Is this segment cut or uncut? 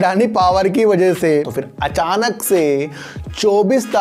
cut